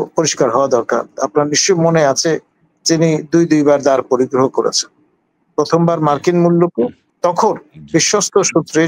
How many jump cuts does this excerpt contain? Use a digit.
1